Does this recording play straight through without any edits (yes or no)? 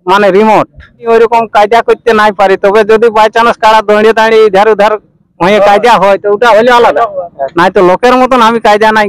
no